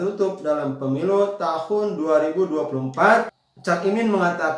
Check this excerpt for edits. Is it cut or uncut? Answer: cut